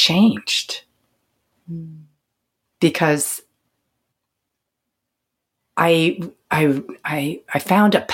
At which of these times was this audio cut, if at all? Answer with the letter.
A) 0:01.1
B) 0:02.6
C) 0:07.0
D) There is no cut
D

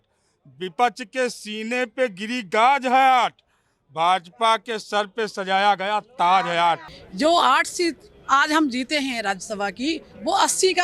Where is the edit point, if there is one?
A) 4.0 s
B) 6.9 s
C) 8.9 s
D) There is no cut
B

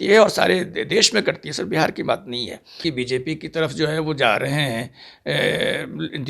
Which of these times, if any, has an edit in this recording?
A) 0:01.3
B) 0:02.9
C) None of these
B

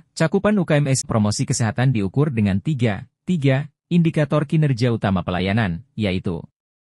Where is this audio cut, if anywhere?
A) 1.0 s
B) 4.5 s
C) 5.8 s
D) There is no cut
A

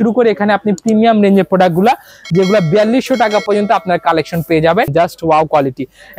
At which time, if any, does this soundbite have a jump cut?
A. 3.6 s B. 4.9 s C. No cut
B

